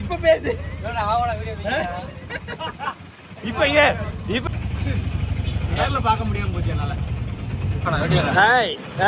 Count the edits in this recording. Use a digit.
2